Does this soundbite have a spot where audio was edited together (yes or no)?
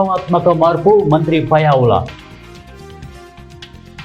yes